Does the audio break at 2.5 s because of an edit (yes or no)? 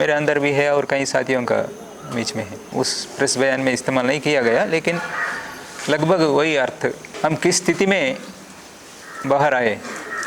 yes